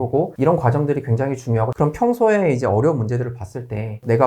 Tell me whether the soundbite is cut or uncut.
cut